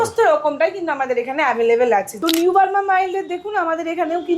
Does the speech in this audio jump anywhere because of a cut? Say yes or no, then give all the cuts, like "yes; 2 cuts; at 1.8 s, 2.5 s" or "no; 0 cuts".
yes; 1 cut; at 2.1 s